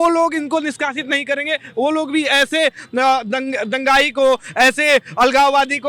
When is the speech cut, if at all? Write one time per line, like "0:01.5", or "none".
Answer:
none